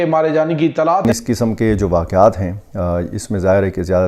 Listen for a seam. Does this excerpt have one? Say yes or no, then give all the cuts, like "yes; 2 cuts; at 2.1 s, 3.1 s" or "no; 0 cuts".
yes; 1 cut; at 1.0 s